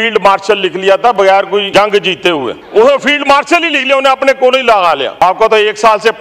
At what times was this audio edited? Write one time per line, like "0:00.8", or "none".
0:01.7
0:02.6
0:05.2